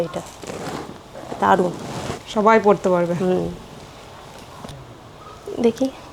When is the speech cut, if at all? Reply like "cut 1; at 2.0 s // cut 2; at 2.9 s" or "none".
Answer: cut 1; at 4.7 s